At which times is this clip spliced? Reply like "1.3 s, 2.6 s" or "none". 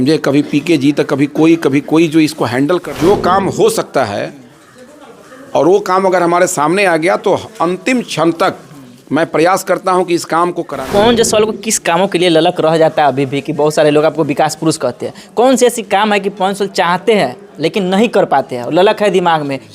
2.9 s, 10.7 s